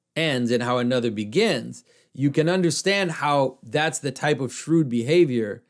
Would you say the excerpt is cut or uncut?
uncut